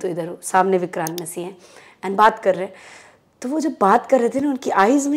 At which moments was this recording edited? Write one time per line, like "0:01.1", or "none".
none